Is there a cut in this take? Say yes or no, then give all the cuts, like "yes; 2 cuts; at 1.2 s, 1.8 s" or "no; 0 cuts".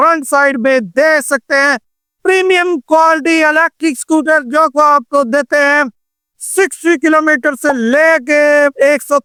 no; 0 cuts